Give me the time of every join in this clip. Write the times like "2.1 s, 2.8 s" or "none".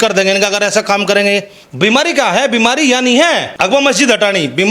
1.6 s, 3.5 s